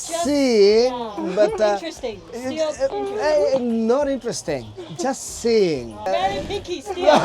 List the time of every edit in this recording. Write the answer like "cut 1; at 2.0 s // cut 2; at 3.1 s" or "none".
cut 1; at 6.1 s